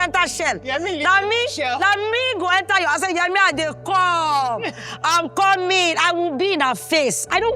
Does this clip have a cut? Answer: no; 0 cuts

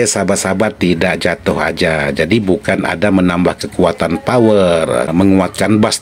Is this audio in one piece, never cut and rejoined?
no; 1 cut; at 5.1 s

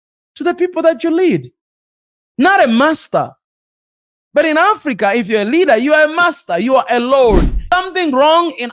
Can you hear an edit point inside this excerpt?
yes; 1 cut; at 7.6 s

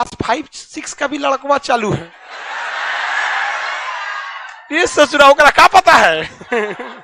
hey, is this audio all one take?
yes; 0 cuts

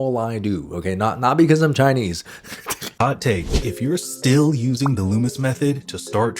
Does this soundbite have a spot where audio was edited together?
yes; 1 cut; at 2.9 s

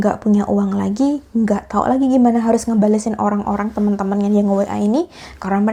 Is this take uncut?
yes; 0 cuts

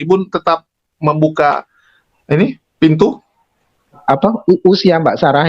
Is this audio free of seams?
no; 1 cut; at 4.0 s

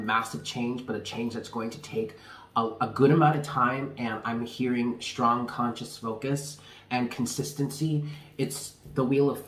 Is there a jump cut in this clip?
no; 0 cuts

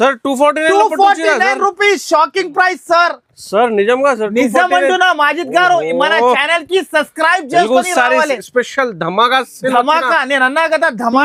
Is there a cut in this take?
no; 0 cuts

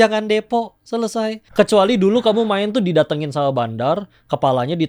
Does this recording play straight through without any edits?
no; 1 cut; at 1.4 s

